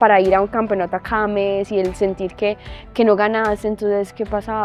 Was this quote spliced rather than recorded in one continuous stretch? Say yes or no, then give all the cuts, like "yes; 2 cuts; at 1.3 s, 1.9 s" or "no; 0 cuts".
no; 0 cuts